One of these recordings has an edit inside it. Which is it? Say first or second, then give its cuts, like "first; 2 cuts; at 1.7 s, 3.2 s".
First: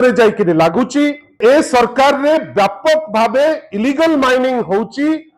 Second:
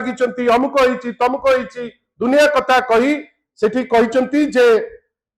first; 1 cut; at 1.4 s